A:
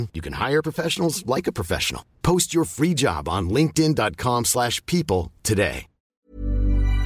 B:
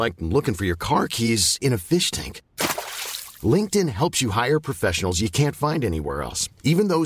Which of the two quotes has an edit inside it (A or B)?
A